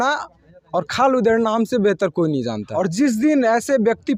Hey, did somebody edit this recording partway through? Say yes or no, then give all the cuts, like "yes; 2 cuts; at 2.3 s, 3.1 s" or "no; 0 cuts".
yes; 1 cut; at 2.6 s